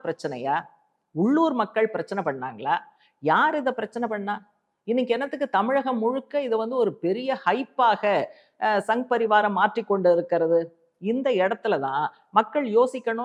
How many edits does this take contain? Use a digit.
0